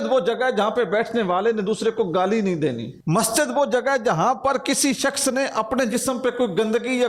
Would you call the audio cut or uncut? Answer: uncut